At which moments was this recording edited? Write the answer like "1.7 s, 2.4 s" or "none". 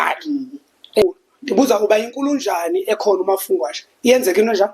1.0 s